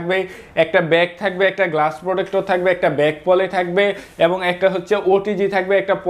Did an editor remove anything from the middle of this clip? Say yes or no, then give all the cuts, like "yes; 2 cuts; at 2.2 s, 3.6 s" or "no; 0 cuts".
no; 0 cuts